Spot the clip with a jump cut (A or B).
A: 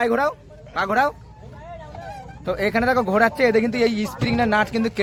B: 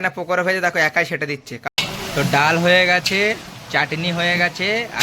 B